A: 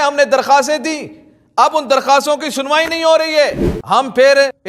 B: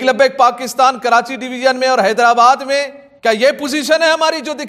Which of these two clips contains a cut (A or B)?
A